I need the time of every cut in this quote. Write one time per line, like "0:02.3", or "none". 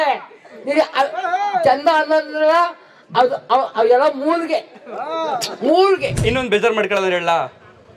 0:06.2